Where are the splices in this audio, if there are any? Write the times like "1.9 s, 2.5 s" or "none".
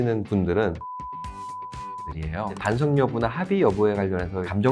none